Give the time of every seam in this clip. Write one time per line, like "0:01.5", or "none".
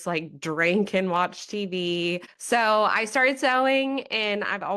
0:02.3